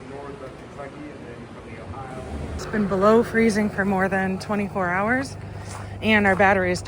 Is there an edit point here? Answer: yes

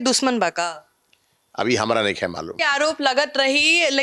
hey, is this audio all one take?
yes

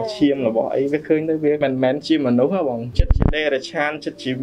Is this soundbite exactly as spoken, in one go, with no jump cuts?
no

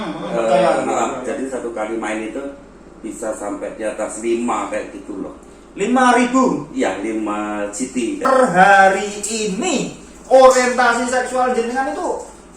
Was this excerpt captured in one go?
no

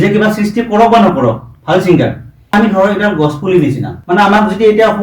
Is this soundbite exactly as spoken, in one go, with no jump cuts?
no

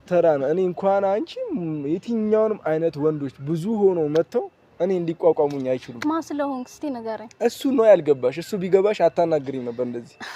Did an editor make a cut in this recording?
no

